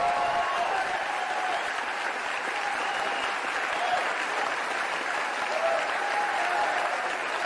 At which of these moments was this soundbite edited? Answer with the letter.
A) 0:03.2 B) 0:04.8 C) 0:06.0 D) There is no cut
A